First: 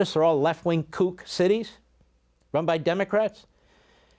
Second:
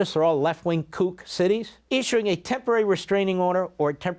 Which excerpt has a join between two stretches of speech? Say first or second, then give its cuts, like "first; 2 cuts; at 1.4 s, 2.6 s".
second; 1 cut; at 1.7 s